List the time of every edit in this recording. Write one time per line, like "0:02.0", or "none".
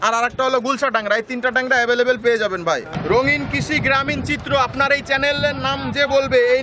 0:02.9